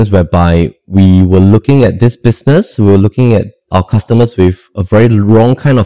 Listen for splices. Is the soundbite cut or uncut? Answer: cut